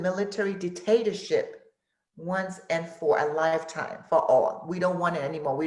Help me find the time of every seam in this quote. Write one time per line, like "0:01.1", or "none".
none